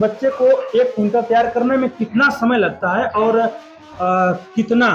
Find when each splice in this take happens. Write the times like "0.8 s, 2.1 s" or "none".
none